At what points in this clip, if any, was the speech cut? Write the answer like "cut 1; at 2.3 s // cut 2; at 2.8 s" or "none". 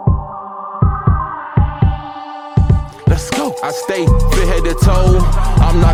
none